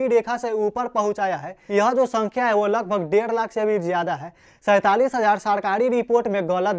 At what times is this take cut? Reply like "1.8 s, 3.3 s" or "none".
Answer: 1.5 s